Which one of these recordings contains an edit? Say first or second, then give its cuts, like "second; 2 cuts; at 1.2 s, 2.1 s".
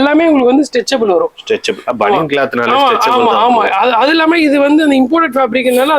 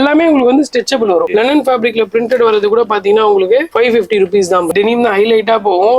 second; 2 cuts; at 1.3 s, 4.7 s